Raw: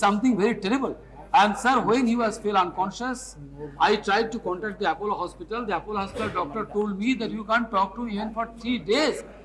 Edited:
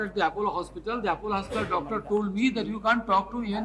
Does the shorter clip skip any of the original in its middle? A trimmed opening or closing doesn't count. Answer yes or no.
no